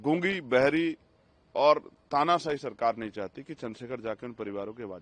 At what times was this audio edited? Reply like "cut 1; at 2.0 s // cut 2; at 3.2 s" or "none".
none